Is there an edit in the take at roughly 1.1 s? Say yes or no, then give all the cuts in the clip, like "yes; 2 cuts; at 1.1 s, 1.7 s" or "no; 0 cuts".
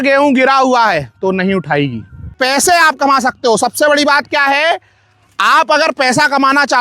no; 1 cut; at 2.3 s